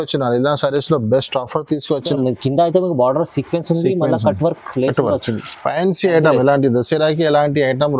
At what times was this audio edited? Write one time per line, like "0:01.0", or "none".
0:02.1